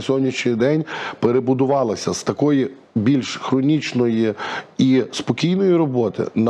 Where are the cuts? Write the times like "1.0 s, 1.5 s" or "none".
none